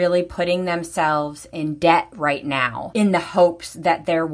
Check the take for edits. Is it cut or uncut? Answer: uncut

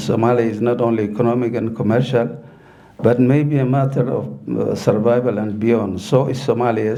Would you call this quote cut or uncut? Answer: uncut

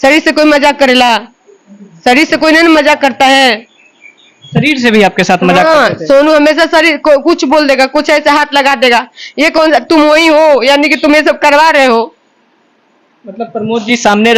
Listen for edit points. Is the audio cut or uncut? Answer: uncut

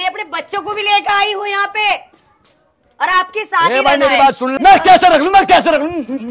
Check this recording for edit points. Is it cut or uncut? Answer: cut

